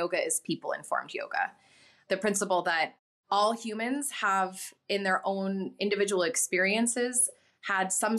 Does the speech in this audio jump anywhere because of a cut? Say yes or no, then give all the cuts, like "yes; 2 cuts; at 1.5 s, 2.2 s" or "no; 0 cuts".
yes; 1 cut; at 1.9 s